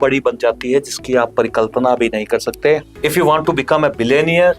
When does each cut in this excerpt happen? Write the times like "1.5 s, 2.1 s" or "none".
2.9 s